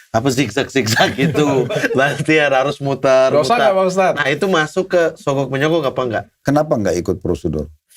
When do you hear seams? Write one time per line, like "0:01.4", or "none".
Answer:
0:06.4